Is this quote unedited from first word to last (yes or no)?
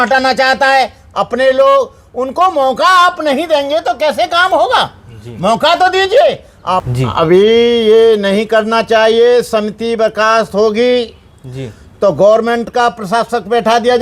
no